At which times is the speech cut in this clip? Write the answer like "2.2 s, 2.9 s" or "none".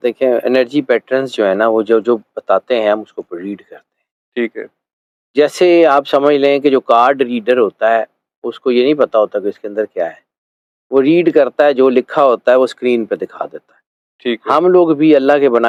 none